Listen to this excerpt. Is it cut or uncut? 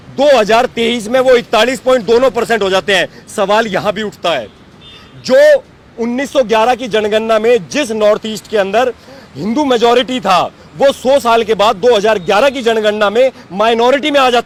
uncut